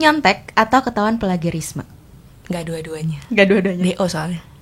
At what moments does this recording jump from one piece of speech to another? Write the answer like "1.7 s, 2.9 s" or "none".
none